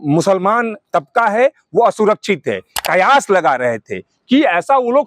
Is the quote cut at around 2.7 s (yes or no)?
yes